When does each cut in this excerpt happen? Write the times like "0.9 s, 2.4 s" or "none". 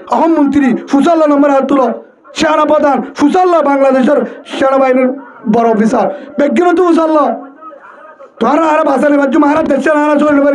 2.2 s